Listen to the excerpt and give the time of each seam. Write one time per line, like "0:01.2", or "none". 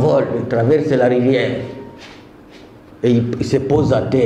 none